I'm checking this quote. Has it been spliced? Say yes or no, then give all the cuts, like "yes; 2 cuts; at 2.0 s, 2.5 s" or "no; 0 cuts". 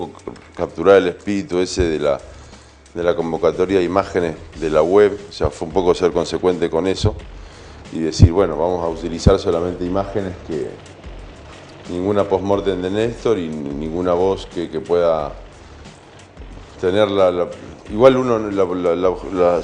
no; 0 cuts